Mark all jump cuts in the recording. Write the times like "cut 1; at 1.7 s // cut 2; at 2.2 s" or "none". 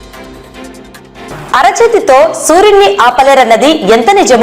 cut 1; at 1.3 s